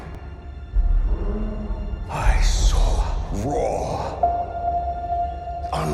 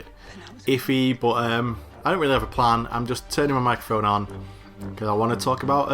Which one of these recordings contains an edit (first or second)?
first